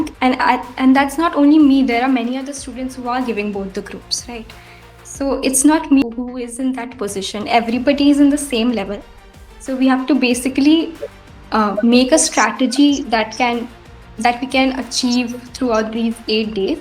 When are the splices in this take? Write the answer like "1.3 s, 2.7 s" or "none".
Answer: 6.0 s

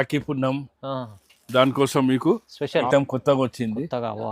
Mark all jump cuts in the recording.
2.9 s

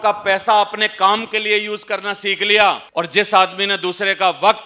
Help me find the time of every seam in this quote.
2.8 s

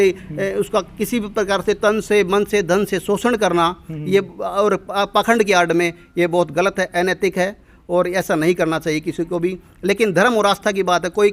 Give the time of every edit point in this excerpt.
none

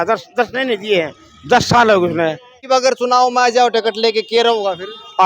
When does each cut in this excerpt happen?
2.5 s

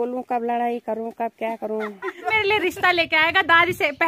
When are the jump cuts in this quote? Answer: 2.3 s

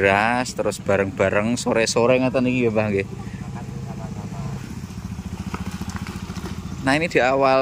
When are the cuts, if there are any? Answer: 4.6 s

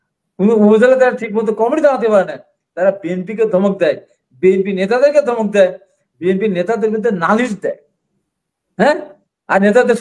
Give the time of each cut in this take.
none

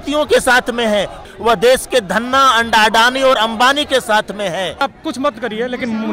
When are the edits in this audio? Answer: 1.3 s, 4.8 s

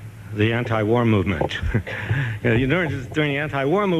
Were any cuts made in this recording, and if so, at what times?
none

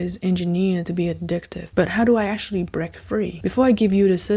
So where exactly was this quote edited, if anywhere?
1.6 s, 3.3 s

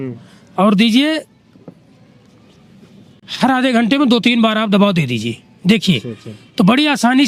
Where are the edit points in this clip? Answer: none

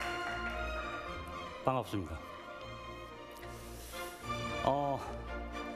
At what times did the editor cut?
4.7 s

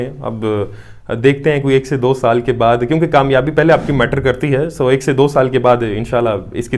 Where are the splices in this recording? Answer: none

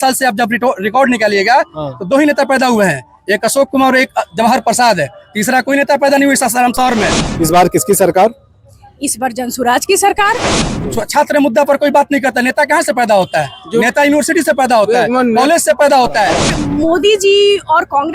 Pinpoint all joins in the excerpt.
7.3 s, 10.6 s, 16.6 s

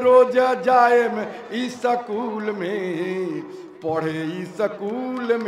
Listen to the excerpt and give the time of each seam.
none

